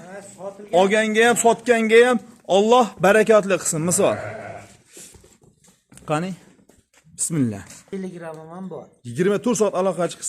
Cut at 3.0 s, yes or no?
no